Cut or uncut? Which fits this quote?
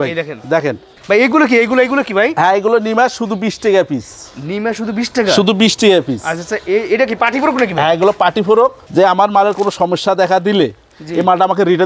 cut